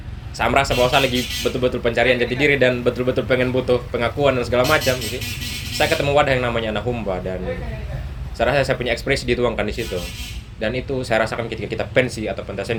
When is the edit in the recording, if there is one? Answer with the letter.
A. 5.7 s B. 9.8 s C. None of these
C